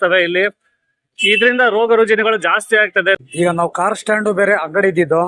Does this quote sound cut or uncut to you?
cut